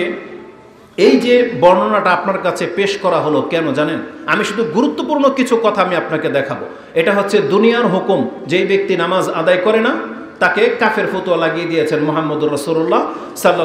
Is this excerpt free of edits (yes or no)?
yes